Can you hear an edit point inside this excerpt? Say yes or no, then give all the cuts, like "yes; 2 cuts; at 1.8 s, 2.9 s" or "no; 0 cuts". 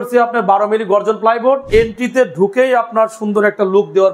yes; 1 cut; at 1.6 s